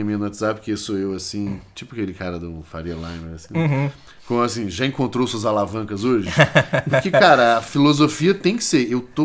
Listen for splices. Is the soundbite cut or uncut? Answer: uncut